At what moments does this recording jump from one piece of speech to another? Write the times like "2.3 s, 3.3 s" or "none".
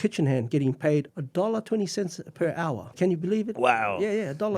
1.1 s, 2.9 s